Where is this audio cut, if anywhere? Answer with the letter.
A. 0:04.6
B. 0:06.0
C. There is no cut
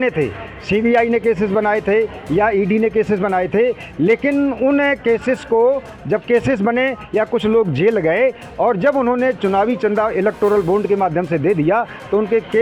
C